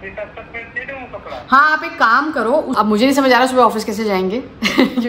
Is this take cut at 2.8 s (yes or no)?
yes